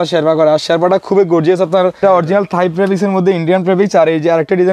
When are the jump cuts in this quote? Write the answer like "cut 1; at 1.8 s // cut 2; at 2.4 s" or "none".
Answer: cut 1; at 2.0 s